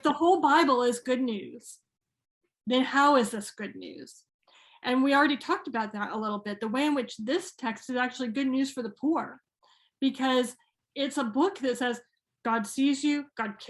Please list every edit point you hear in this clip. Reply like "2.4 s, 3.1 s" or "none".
none